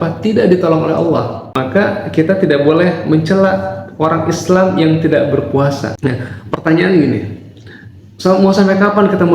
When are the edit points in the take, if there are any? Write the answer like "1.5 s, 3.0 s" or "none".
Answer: 1.4 s, 5.9 s